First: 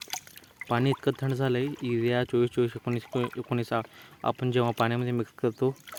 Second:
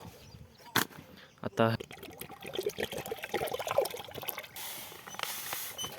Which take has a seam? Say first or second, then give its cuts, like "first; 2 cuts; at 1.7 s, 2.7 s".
second; 2 cuts; at 1.8 s, 4.5 s